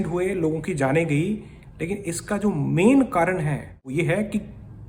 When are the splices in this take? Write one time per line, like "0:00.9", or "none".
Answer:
0:03.9